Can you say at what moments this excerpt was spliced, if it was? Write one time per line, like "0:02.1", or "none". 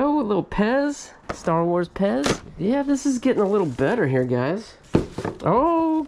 0:04.8